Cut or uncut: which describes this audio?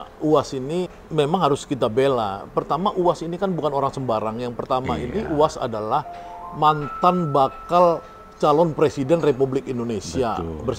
cut